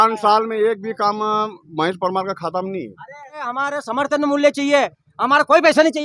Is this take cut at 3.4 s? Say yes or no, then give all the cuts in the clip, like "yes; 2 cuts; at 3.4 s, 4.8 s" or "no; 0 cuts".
yes; 1 cut; at 3.4 s